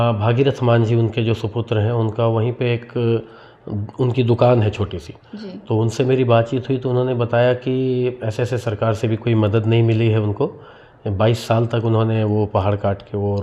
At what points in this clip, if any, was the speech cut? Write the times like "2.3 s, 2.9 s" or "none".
none